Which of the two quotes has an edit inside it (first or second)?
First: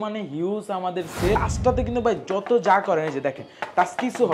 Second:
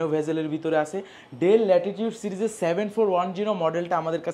first